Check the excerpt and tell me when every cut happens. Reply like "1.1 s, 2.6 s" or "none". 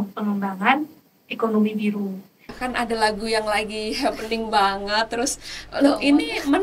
2.5 s

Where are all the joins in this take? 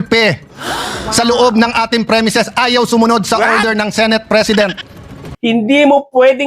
5.2 s

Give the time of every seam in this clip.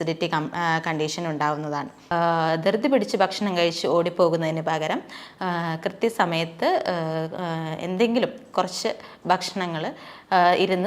2.0 s

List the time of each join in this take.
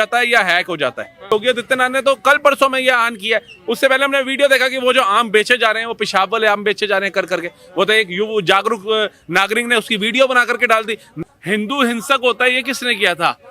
1.3 s, 11.0 s

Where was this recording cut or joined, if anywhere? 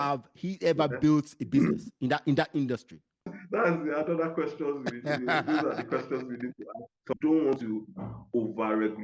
3.4 s, 7.1 s

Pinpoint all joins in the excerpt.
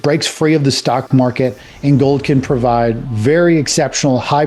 none

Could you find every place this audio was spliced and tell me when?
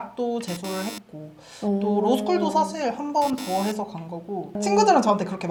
none

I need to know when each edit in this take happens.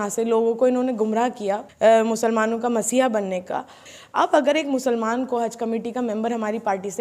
1.7 s, 3.9 s

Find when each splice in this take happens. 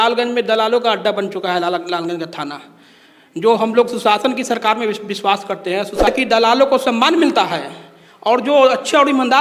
6.1 s

